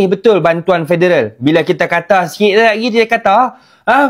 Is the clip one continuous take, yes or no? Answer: yes